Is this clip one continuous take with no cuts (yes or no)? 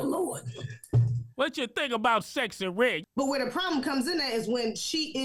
no